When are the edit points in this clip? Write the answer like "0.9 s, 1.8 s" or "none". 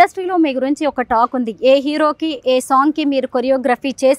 none